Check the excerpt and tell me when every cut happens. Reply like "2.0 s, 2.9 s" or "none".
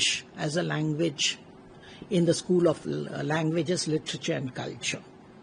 none

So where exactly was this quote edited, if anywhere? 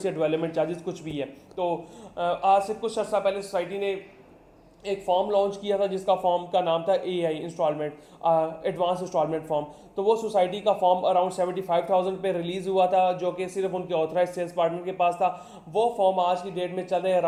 none

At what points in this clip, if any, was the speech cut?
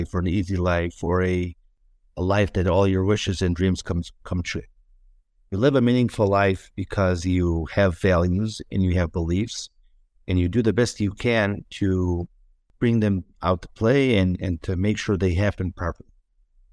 none

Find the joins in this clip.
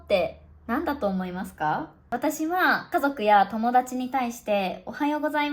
2.0 s, 2.8 s

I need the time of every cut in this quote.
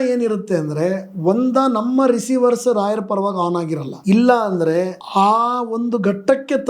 3.9 s, 5.0 s

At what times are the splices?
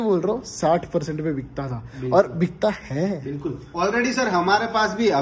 none

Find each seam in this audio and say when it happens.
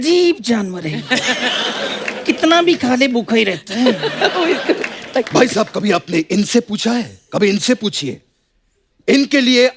none

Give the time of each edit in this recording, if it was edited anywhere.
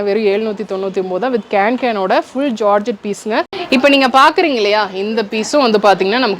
3.6 s

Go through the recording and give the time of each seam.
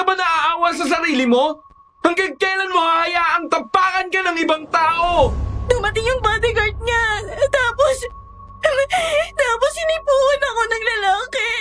5.5 s

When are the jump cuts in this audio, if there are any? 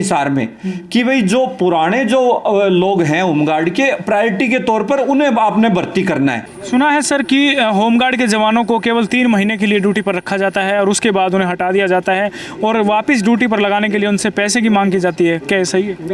6.5 s

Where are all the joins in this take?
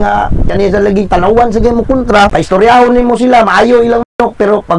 2.3 s

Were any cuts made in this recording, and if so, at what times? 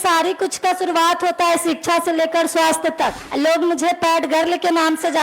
3.2 s

